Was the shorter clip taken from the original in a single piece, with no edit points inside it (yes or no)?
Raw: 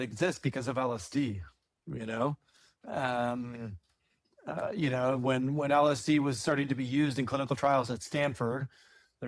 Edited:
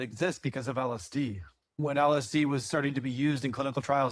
no